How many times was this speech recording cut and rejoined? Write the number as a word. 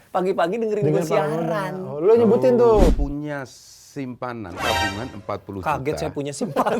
one